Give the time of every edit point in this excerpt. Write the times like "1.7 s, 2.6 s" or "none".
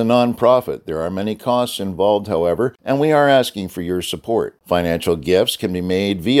2.8 s, 4.6 s